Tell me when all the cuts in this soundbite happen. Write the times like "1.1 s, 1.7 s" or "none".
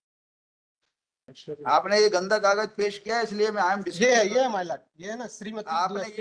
1.3 s